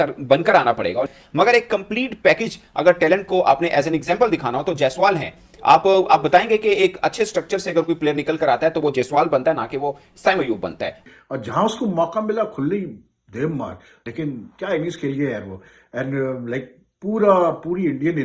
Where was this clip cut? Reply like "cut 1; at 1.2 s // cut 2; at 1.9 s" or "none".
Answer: cut 1; at 11.0 s